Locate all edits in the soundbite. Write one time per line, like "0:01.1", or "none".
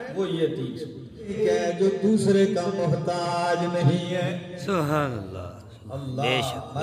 0:01.3